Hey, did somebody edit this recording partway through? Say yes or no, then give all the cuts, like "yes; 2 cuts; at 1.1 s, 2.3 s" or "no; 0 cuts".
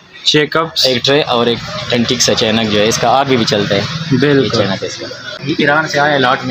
yes; 1 cut; at 5.3 s